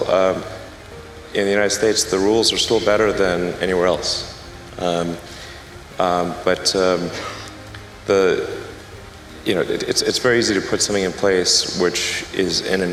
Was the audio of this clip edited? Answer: no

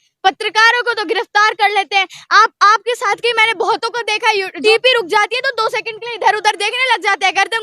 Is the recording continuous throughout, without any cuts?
no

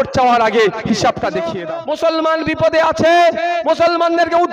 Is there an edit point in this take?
yes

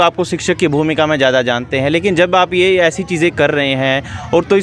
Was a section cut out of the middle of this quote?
no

